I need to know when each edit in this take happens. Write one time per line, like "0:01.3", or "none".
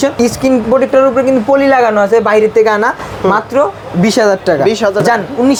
none